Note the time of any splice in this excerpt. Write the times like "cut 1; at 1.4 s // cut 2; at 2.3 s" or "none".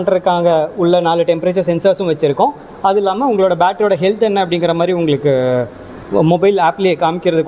none